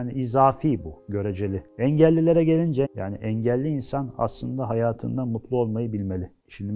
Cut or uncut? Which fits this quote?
cut